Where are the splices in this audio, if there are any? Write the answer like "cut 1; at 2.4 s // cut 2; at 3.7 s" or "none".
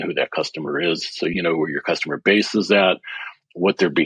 cut 1; at 1.3 s